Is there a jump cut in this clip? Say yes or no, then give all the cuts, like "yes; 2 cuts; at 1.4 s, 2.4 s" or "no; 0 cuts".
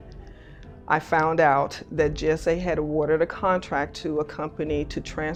no; 0 cuts